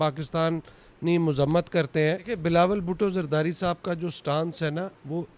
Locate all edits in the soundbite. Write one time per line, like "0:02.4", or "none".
0:02.3